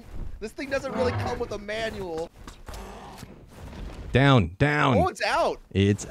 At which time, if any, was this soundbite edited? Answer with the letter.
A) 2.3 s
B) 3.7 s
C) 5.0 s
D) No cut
A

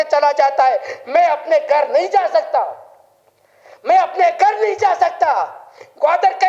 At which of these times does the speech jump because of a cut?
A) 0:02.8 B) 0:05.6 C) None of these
C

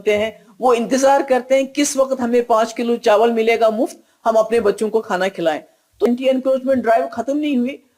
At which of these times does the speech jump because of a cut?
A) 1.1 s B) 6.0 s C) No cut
B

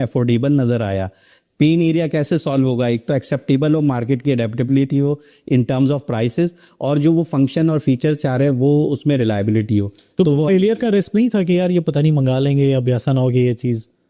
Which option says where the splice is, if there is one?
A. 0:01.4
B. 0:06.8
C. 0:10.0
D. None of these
D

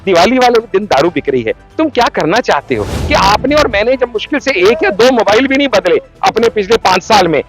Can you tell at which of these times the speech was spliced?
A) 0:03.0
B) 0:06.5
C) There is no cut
A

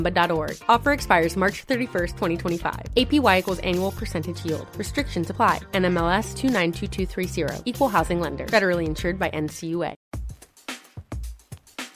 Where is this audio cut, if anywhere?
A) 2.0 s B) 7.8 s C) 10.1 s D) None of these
C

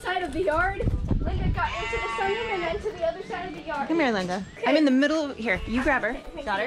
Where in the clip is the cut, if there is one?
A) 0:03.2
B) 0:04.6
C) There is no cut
B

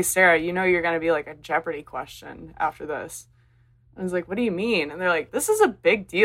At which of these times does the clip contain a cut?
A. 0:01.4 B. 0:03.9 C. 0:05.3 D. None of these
C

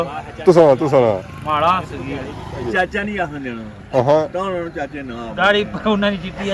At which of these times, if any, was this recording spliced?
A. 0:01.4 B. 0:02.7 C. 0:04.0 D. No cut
B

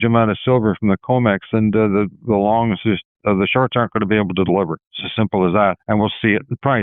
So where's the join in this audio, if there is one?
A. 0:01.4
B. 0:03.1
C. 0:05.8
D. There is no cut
C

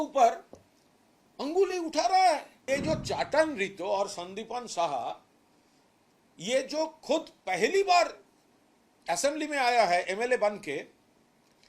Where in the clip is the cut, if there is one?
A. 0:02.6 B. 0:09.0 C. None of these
A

